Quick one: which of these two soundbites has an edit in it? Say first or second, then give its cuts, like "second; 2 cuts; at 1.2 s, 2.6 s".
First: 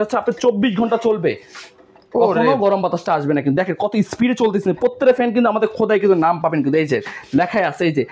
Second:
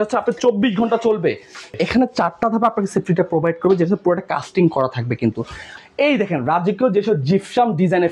second; 2 cuts; at 1.7 s, 5.7 s